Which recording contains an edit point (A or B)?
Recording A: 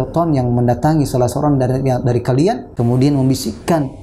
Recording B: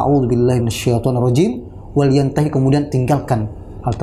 A